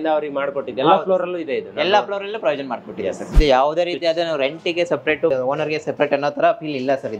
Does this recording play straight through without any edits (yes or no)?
no